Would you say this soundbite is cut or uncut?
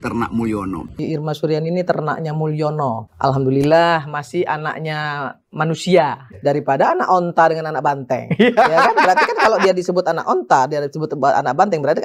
cut